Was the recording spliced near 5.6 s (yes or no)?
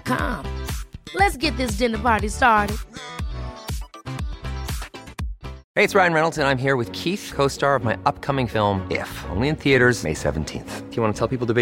yes